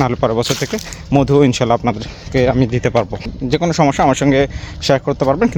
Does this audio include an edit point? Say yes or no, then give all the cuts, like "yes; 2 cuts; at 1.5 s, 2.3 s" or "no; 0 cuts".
no; 0 cuts